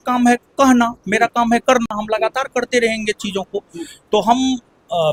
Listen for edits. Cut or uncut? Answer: uncut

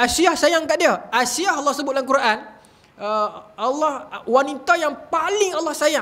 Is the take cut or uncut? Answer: uncut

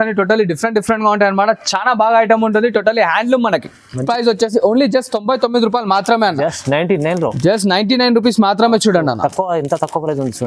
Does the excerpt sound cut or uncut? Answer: cut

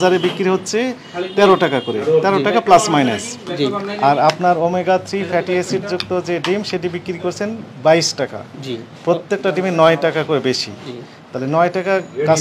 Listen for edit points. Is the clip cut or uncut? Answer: uncut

